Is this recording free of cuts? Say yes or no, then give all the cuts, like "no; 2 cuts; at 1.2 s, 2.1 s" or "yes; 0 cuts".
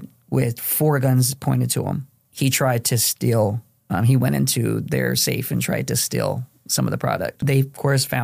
no; 2 cuts; at 2.2 s, 7.4 s